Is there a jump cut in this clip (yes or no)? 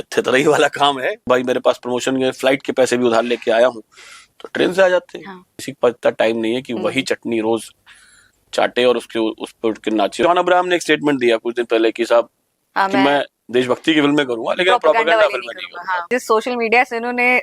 yes